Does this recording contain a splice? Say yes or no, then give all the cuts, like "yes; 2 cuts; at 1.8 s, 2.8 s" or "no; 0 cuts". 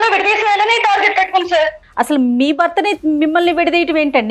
yes; 1 cut; at 1.8 s